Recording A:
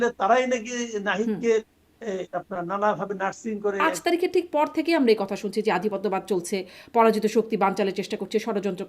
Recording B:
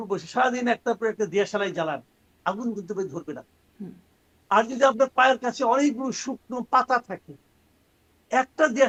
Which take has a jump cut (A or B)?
A